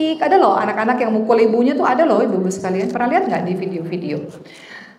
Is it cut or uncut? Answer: uncut